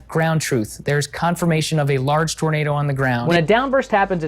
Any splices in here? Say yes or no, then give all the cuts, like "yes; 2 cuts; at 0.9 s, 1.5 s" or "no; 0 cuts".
yes; 1 cut; at 3.2 s